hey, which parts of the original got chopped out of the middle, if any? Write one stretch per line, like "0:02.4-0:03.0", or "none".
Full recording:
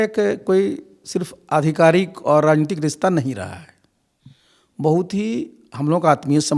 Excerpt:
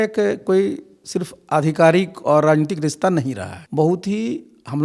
0:03.5-0:04.6